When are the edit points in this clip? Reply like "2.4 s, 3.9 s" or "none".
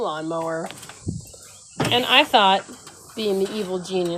none